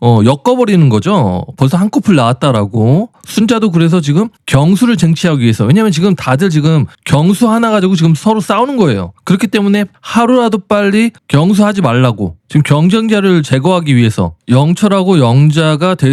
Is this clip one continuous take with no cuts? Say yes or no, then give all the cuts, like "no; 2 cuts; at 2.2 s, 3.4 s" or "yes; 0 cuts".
yes; 0 cuts